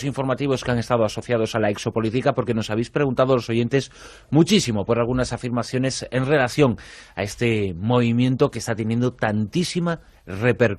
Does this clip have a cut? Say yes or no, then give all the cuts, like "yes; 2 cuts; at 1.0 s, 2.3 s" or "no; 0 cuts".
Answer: yes; 1 cut; at 4.5 s